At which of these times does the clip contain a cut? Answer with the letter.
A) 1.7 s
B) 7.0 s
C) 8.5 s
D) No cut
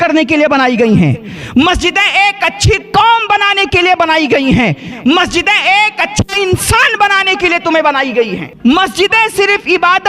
C